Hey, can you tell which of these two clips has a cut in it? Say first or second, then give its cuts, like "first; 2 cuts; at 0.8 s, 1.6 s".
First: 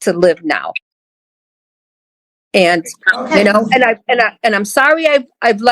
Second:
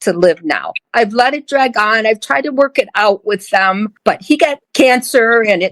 second; 2 cuts; at 0.8 s, 4.4 s